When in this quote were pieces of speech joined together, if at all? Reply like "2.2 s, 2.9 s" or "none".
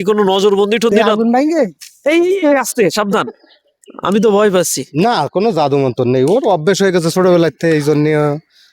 1.0 s, 4.8 s